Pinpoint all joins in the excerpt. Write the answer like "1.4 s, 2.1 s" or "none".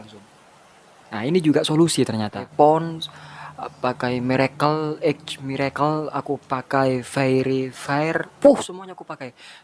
2.5 s